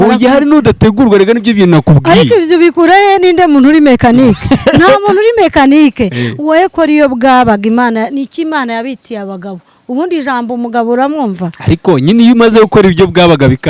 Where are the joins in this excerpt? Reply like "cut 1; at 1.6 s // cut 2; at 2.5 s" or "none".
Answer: none